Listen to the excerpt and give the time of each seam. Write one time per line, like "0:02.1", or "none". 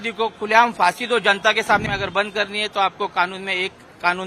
0:01.8